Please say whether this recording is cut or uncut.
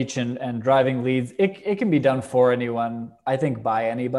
uncut